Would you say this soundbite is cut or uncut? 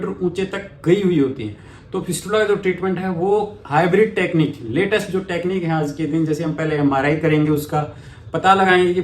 uncut